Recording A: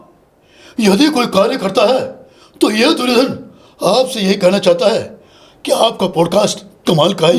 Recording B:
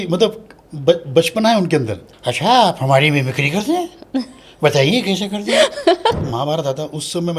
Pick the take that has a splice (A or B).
B